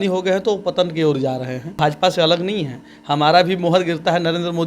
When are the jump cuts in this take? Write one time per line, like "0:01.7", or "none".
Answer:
0:01.8